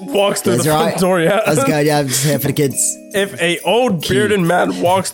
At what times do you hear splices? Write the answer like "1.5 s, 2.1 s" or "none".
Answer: 3.2 s